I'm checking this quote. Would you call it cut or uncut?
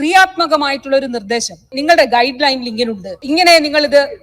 cut